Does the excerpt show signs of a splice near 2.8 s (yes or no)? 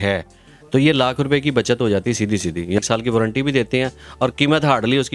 yes